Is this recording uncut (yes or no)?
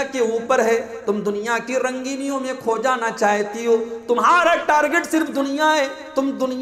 yes